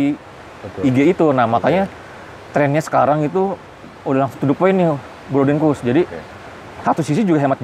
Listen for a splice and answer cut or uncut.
uncut